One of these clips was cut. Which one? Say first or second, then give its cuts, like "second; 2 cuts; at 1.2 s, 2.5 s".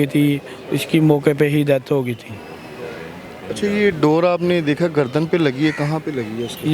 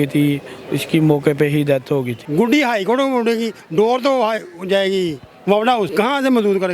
second; 2 cuts; at 2.2 s, 5.9 s